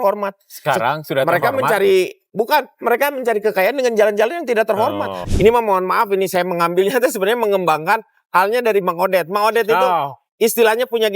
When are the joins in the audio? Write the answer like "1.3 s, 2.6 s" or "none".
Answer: 5.1 s